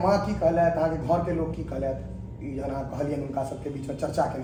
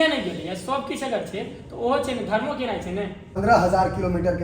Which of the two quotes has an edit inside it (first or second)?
second